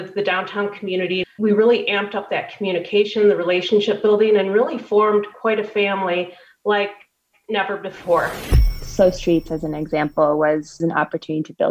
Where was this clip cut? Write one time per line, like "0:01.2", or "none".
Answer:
0:01.2
0:08.7